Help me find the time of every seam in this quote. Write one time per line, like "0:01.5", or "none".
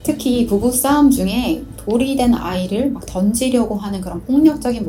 none